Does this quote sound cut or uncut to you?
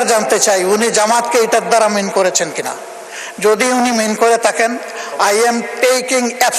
uncut